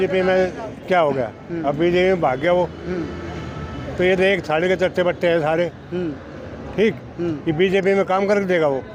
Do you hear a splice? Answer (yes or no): no